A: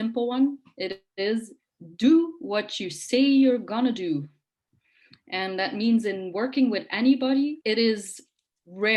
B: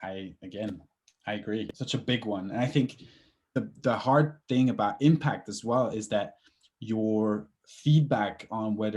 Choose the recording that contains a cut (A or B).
B